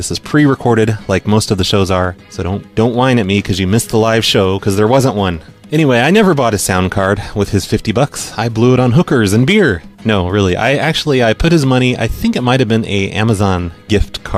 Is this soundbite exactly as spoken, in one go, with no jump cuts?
yes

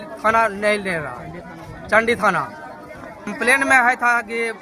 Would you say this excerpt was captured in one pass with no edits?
no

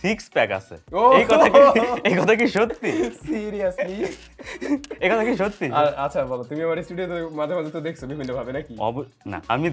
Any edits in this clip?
no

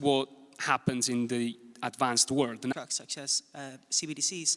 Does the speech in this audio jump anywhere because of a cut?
yes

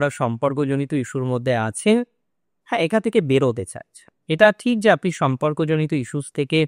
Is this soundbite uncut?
yes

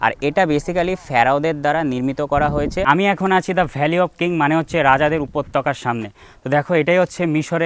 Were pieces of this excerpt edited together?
yes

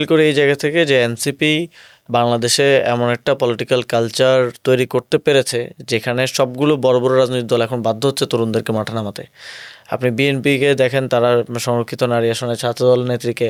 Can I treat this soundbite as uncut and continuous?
yes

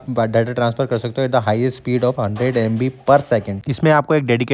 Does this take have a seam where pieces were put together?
no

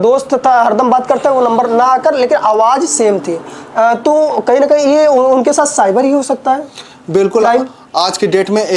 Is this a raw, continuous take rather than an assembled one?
yes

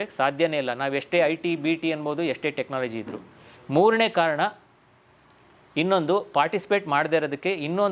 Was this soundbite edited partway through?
no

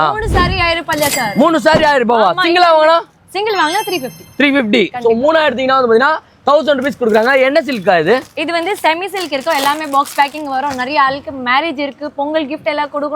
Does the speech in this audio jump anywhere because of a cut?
no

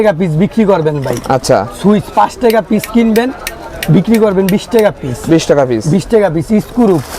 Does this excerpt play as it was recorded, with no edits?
yes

